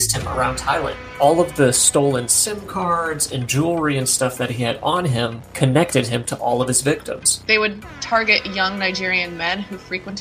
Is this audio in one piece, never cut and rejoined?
no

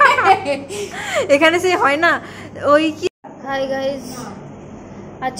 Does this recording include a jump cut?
yes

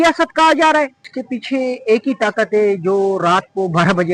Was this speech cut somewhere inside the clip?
yes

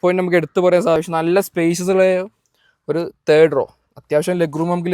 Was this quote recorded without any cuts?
no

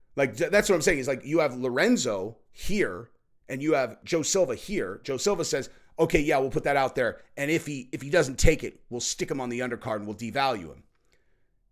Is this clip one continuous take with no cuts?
no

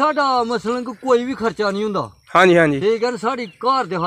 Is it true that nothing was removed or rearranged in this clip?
yes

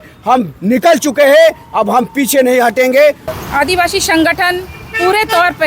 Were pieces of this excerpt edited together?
yes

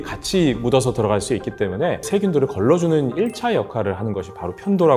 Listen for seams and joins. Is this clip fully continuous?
no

